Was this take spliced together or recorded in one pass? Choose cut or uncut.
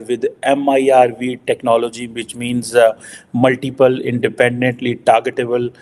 uncut